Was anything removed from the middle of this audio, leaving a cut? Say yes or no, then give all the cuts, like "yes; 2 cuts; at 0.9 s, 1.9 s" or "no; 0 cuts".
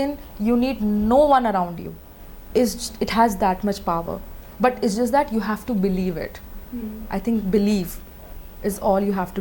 no; 0 cuts